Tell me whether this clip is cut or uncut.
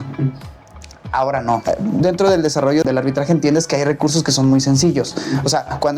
cut